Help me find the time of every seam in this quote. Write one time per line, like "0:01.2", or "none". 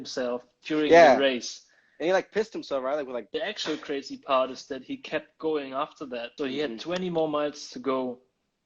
0:03.3
0:06.3